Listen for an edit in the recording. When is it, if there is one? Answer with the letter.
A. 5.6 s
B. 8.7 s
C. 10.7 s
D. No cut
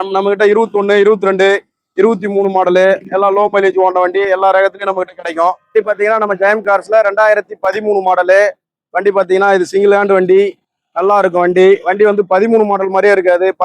A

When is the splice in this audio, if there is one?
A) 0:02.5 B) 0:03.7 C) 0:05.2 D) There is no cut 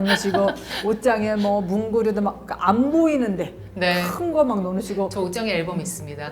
D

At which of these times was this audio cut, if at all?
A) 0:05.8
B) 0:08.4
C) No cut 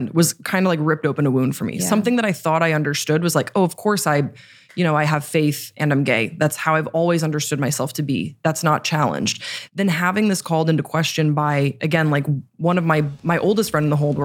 C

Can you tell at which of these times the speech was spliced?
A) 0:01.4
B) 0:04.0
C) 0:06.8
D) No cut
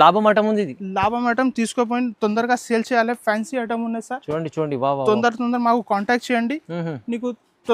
D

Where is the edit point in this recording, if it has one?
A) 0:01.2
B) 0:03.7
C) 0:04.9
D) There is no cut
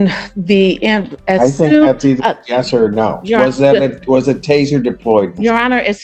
D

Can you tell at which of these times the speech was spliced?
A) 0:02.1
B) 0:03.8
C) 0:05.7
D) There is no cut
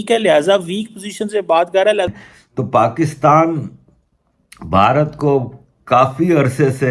A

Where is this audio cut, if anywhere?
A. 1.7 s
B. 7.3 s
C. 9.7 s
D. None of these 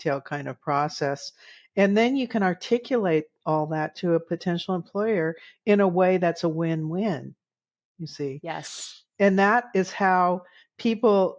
D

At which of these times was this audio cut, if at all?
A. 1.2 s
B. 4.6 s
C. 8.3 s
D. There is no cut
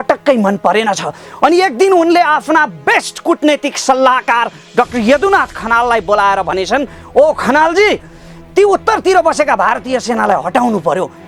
D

